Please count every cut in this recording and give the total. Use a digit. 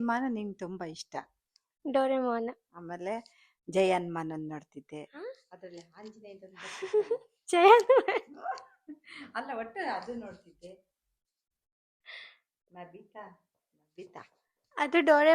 0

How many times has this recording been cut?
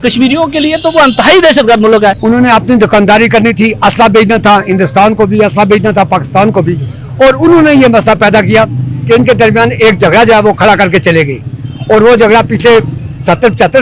1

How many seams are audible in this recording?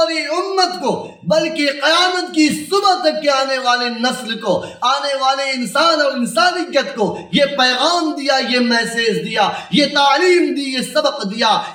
0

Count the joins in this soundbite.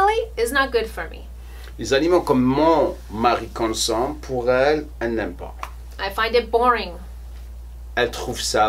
0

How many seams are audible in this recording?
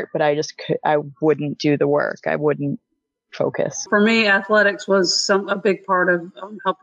1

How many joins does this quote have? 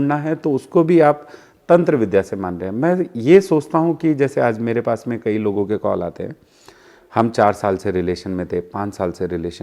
0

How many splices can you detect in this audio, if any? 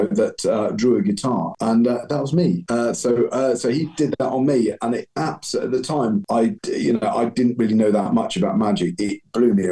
3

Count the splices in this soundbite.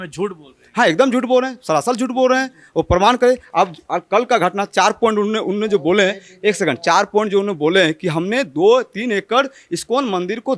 0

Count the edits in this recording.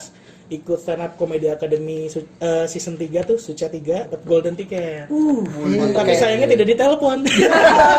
1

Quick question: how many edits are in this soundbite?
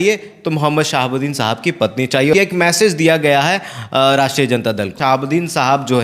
2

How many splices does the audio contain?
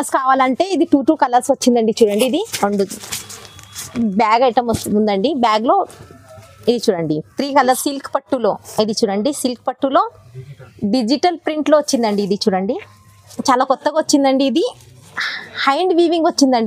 2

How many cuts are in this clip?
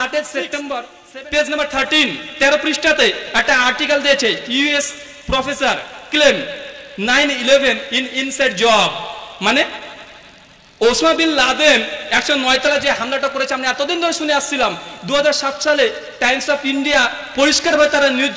1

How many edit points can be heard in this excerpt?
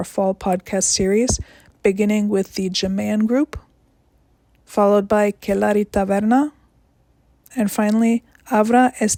0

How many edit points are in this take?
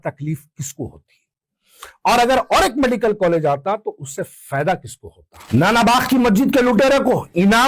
1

